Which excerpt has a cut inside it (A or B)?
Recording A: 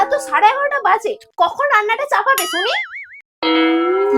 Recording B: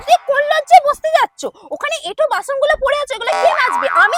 A